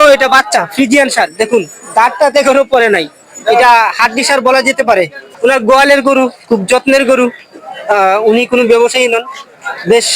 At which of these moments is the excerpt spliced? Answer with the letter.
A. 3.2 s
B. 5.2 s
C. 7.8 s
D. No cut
B